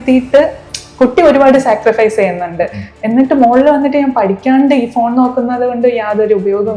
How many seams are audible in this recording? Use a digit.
0